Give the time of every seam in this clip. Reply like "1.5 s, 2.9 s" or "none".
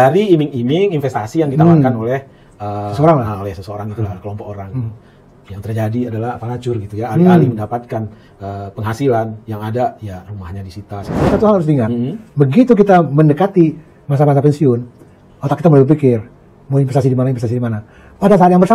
11.1 s